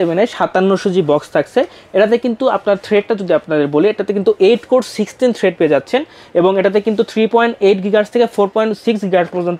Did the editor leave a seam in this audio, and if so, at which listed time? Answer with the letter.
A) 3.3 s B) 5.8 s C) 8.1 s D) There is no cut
D